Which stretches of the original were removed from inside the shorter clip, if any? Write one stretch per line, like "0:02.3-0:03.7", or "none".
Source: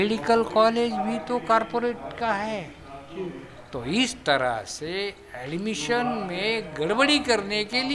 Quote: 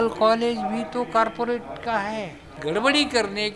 0:02.9-0:06.7